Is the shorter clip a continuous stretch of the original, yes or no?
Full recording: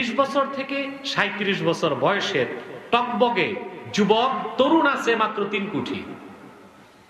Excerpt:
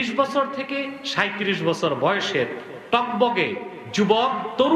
yes